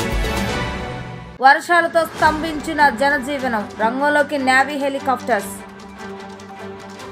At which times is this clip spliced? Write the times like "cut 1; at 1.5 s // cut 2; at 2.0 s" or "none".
cut 1; at 1.1 s